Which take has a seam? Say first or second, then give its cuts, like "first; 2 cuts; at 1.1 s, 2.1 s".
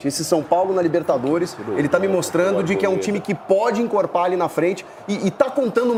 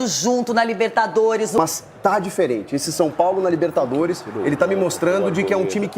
second; 1 cut; at 1.6 s